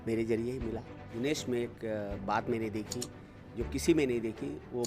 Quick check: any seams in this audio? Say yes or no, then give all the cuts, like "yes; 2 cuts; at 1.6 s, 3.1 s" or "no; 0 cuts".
yes; 1 cut; at 1.0 s